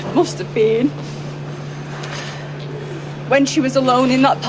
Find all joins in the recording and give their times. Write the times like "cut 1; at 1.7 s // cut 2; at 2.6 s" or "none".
none